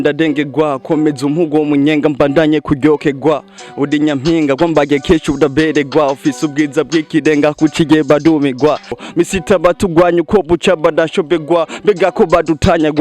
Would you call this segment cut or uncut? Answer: cut